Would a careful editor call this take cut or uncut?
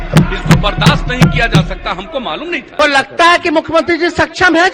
cut